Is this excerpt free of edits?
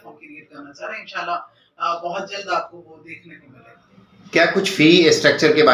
no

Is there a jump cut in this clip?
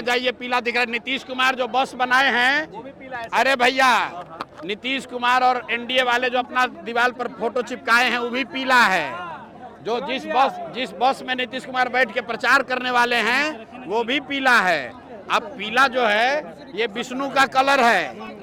no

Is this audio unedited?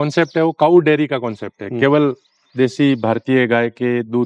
yes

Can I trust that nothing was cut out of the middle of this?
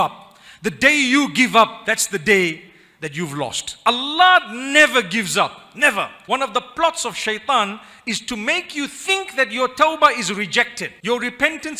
no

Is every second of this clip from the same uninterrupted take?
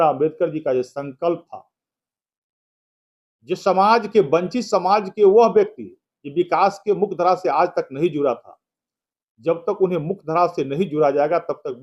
yes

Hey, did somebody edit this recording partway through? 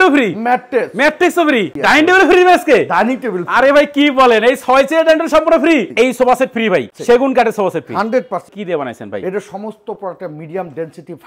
yes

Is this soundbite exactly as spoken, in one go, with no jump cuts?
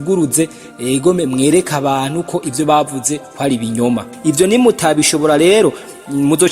no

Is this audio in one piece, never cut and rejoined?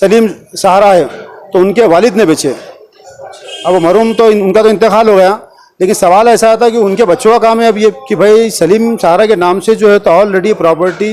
yes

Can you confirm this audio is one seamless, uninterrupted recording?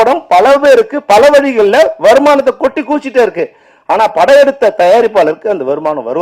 yes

